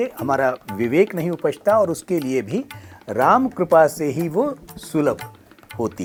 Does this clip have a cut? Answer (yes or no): no